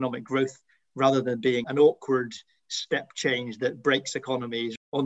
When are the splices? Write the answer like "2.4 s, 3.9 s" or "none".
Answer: none